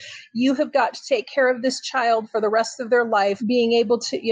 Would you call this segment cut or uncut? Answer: cut